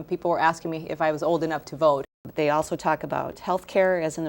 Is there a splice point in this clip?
yes; 1 cut; at 2.3 s

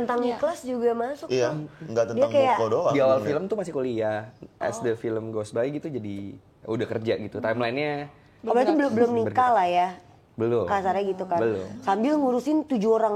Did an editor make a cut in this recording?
yes; 1 cut; at 2.9 s

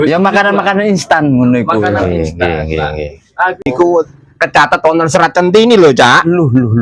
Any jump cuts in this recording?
yes; 1 cut; at 3.7 s

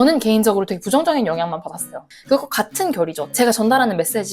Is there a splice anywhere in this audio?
yes; 2 cuts; at 2.1 s, 3.3 s

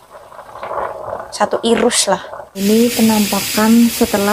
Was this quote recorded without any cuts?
no; 1 cut; at 2.6 s

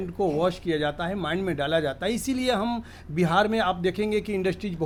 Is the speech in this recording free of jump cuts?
yes; 0 cuts

